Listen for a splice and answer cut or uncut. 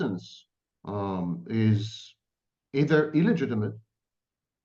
uncut